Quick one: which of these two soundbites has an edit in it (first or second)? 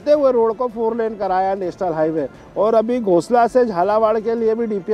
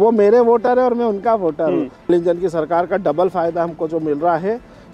second